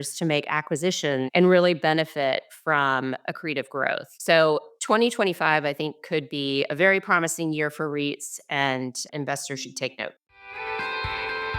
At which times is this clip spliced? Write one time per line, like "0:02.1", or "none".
0:01.3
0:10.2